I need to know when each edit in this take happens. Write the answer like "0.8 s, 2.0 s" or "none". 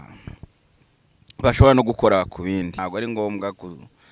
2.7 s